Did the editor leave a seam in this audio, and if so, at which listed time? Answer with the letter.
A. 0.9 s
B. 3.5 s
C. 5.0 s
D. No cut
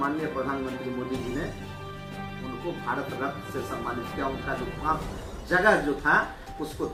D